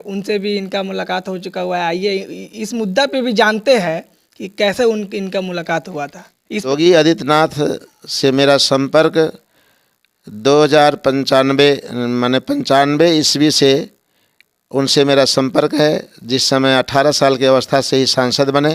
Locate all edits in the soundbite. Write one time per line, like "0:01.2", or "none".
0:06.7